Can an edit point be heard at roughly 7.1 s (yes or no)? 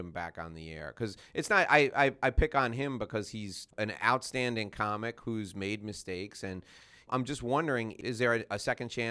yes